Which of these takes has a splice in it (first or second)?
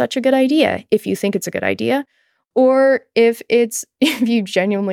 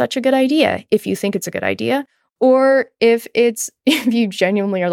second